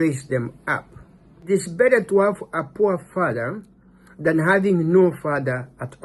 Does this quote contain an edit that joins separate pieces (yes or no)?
yes